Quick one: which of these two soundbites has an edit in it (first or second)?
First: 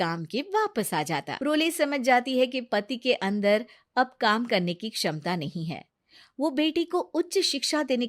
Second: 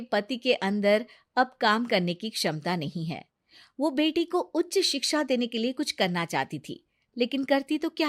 first